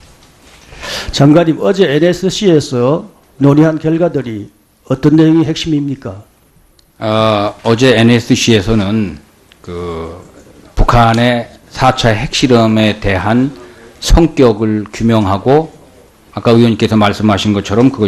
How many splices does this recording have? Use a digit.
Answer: 1